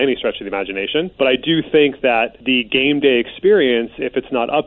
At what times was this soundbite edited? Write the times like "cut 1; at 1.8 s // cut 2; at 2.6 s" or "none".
cut 1; at 1.1 s // cut 2; at 2.4 s